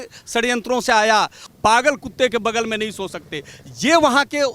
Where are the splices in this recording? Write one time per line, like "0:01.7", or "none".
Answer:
0:01.4